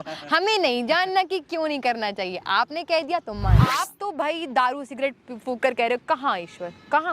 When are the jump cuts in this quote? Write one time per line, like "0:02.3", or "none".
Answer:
0:03.8